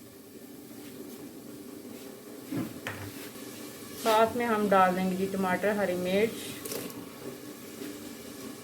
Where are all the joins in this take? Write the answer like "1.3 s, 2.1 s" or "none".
3.3 s